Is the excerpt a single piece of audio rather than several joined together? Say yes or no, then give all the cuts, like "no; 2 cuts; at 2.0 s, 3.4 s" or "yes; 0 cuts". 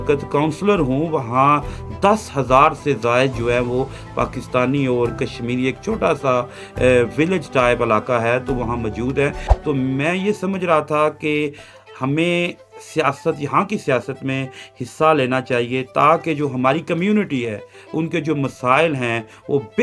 yes; 0 cuts